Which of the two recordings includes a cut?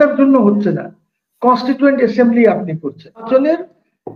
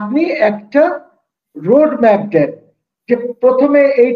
first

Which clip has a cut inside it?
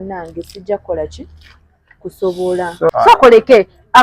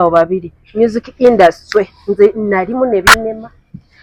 first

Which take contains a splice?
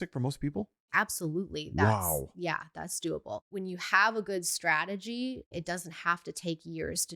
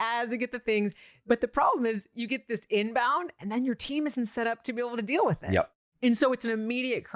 first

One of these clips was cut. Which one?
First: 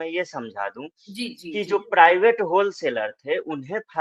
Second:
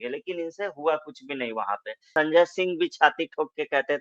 second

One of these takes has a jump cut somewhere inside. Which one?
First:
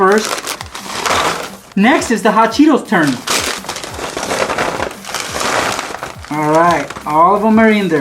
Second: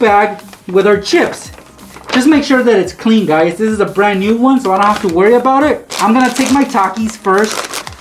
first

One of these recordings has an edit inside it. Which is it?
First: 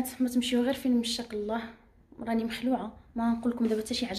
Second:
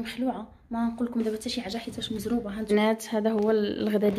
second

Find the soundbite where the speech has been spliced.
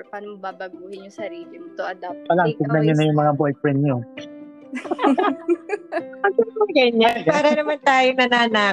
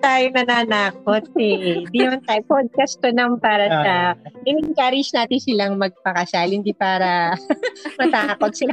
first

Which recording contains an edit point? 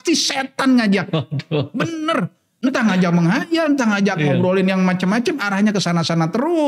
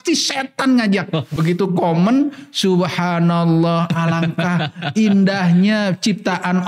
second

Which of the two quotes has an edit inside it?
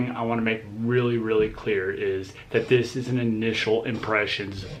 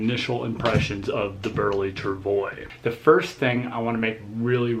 second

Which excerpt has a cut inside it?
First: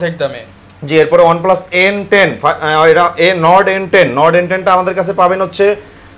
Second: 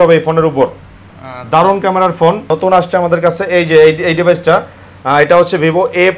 second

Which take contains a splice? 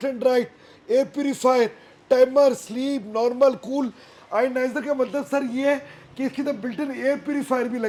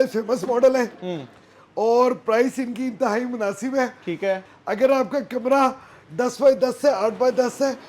second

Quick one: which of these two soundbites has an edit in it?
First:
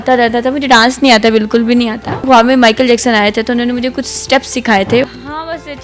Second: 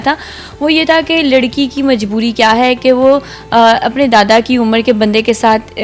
first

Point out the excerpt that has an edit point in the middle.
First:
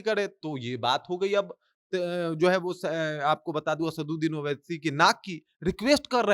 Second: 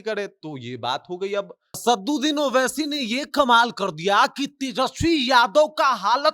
second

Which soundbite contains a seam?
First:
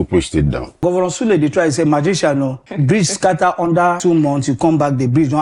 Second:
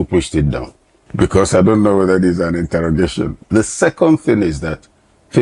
first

